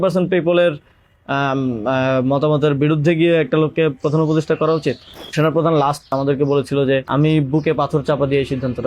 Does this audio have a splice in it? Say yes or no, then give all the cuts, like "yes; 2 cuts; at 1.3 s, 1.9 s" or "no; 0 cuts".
yes; 3 cuts; at 5.3 s, 6.1 s, 7.1 s